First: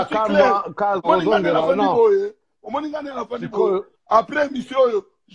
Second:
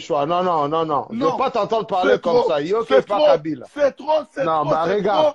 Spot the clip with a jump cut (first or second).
first